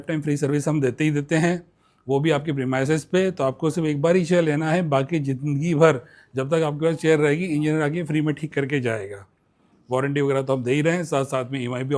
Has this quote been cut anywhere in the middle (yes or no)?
no